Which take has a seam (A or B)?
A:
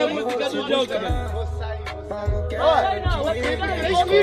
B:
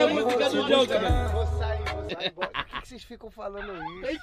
B